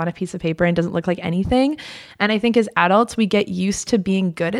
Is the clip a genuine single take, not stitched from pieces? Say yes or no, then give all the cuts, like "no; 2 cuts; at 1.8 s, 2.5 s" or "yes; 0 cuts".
yes; 0 cuts